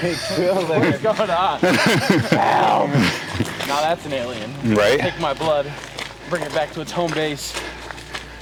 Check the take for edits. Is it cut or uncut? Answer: uncut